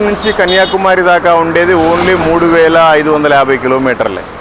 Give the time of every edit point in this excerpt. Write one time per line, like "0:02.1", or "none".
none